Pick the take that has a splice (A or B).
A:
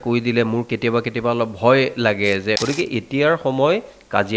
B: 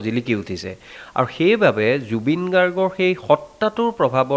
A